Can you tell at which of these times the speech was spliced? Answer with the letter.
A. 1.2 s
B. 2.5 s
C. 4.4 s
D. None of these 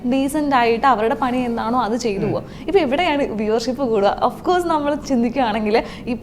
D